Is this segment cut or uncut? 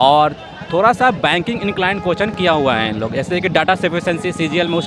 uncut